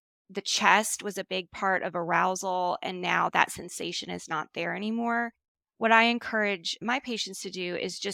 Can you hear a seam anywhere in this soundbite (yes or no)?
no